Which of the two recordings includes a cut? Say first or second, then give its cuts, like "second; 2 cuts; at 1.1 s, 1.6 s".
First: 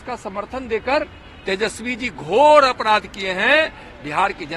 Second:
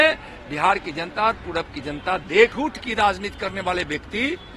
second; 1 cut; at 2.5 s